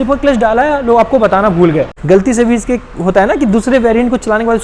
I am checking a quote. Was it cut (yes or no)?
yes